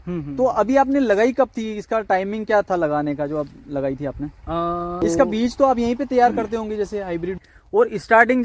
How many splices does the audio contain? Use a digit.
2